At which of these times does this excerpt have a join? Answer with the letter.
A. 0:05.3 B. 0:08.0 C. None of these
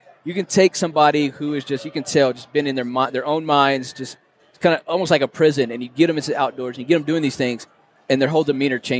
C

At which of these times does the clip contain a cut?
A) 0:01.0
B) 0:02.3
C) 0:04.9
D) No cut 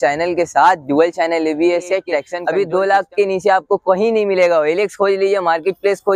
B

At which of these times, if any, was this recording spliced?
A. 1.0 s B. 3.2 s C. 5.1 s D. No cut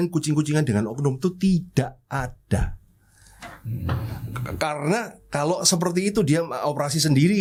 D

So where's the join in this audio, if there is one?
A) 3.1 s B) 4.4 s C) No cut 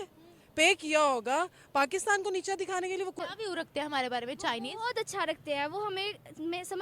A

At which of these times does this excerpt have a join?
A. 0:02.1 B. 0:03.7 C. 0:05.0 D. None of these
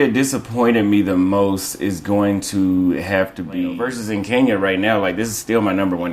B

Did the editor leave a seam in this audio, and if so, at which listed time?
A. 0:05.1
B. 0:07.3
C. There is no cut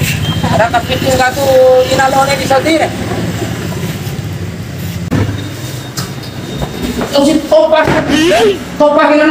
A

